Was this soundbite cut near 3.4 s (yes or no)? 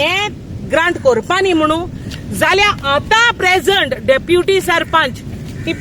yes